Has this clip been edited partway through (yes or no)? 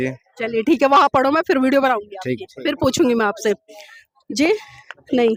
no